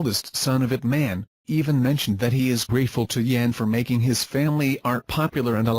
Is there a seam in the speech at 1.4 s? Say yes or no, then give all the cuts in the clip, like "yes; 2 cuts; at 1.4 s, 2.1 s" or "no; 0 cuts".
no; 1 cut; at 3.6 s